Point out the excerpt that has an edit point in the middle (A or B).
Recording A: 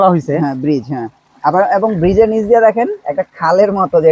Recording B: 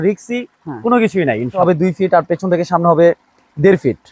B